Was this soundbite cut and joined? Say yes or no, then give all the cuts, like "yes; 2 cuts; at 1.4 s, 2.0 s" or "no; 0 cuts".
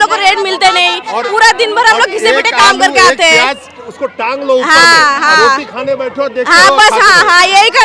no; 0 cuts